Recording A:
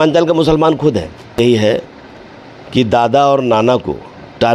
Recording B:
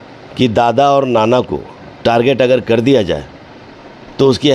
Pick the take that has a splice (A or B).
A